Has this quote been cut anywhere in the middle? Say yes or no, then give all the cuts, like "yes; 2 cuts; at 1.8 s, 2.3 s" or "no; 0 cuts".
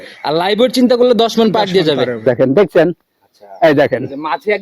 yes; 1 cut; at 2.2 s